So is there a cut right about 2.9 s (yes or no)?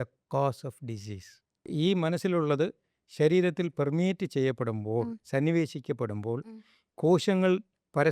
no